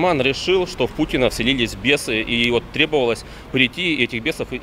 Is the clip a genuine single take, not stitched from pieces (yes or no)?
yes